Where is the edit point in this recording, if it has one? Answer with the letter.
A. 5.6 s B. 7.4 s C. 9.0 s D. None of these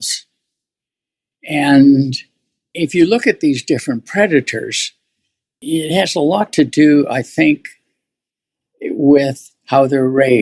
A